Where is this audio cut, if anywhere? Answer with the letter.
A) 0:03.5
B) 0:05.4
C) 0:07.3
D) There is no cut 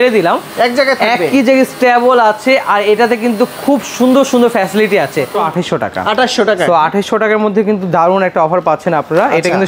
B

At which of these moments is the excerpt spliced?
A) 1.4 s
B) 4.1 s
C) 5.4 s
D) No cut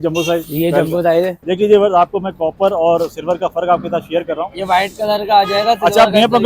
A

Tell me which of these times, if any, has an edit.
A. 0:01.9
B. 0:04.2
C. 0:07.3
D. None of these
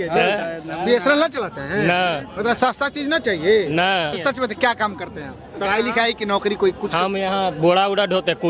B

